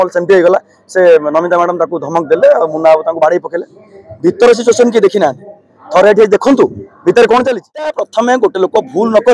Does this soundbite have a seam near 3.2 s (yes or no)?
no